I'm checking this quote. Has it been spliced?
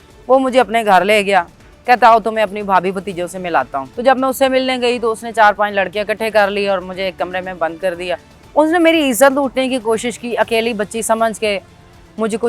yes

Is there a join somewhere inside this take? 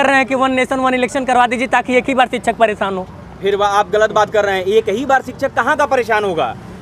no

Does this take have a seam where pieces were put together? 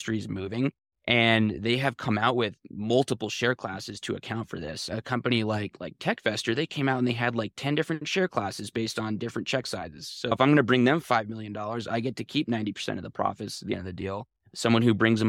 no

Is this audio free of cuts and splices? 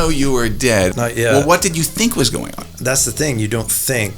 no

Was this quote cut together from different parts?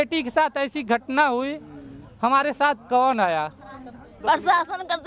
yes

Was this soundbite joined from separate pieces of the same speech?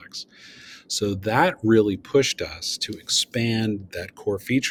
no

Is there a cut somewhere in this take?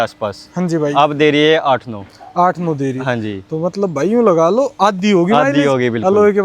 no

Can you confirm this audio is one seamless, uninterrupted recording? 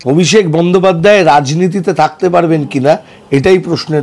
yes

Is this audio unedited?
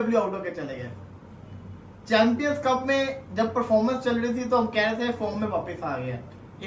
yes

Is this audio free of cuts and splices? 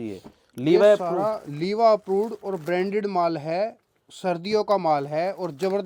yes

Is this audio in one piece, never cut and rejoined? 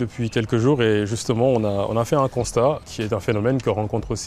no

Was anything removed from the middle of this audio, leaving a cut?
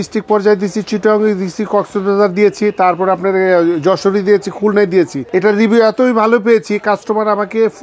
yes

